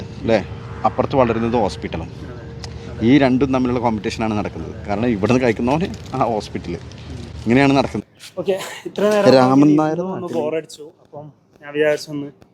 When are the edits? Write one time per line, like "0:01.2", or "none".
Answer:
none

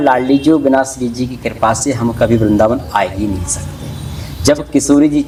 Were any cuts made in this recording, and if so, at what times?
none

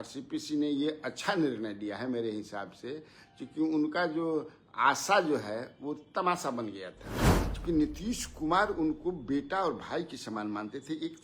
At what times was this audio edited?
0:07.2

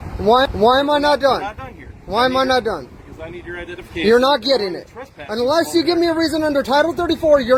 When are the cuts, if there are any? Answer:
none

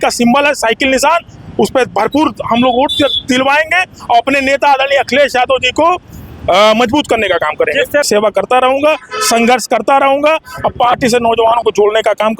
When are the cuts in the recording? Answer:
0:08.0

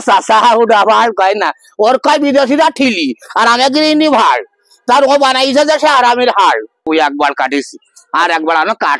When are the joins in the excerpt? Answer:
0:06.9

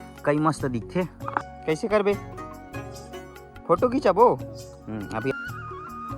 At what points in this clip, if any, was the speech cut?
0:01.5
0:05.3

